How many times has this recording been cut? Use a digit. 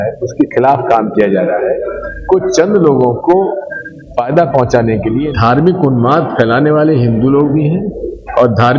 1